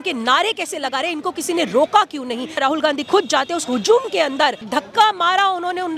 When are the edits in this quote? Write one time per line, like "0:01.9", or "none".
0:02.6
0:04.7

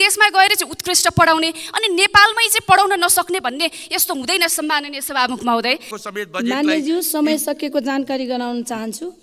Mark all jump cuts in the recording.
0:05.9

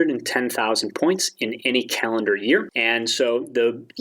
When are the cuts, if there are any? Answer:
0:02.7

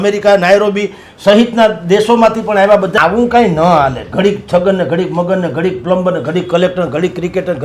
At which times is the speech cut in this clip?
0:02.9

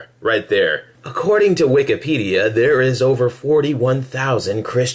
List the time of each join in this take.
none

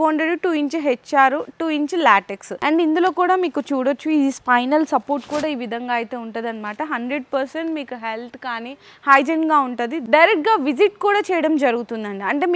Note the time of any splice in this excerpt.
0:02.5
0:10.0

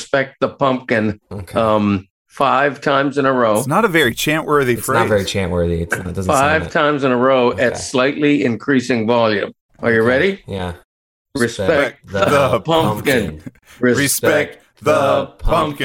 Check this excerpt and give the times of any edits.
none

